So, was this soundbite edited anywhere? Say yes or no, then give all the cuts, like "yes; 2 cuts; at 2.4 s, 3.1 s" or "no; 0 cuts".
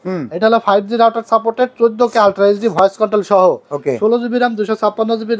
no; 0 cuts